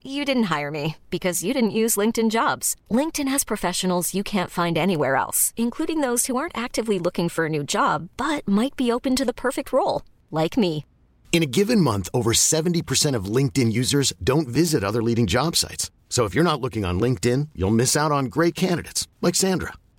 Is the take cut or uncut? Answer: uncut